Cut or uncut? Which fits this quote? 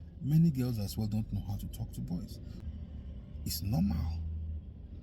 cut